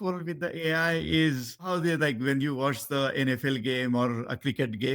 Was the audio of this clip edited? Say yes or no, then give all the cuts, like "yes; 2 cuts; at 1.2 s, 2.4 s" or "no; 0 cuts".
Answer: yes; 1 cut; at 1.7 s